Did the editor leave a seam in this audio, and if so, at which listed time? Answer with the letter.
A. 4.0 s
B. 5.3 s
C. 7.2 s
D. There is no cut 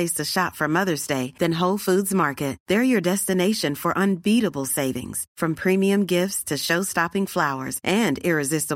D